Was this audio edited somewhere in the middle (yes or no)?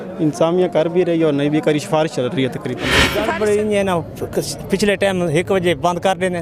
yes